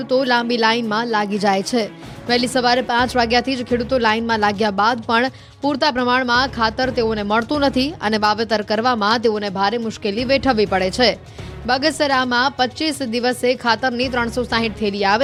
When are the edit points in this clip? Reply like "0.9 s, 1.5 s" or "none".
none

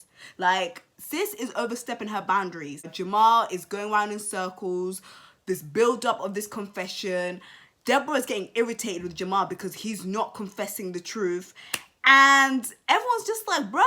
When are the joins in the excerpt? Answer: 2.8 s

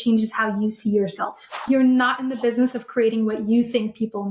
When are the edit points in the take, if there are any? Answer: 1.6 s

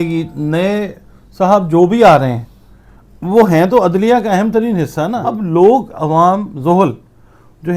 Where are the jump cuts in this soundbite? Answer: 5.2 s

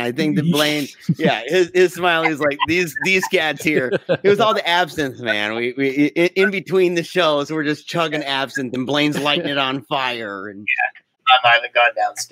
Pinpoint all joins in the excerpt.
11.1 s

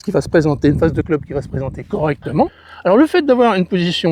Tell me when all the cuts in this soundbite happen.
2.6 s

